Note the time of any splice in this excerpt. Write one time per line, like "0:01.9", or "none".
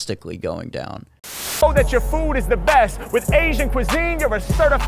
0:01.6